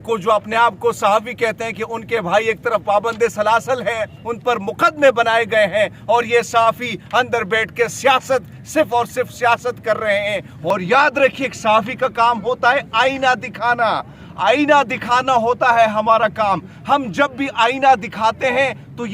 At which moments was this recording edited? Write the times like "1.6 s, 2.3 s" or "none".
10.7 s